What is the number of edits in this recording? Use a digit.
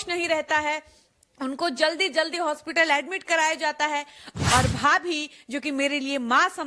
1